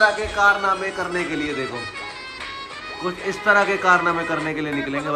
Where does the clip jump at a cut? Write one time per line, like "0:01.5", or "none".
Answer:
none